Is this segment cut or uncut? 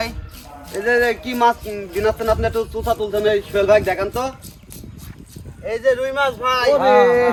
uncut